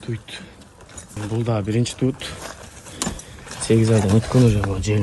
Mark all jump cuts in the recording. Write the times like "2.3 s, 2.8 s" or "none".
1.2 s